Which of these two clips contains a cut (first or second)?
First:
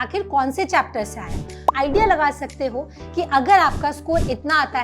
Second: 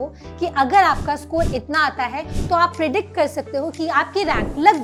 first